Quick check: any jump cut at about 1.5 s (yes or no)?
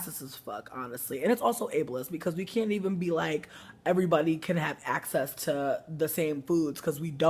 no